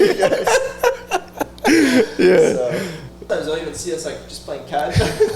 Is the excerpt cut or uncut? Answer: cut